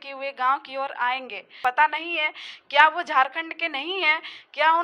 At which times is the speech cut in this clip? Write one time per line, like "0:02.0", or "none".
0:01.5